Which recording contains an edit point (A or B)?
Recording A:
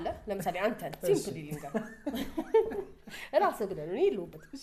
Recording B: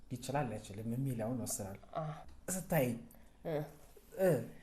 B